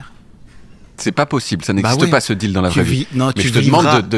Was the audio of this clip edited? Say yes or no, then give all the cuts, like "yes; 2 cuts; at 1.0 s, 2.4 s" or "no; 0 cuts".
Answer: no; 0 cuts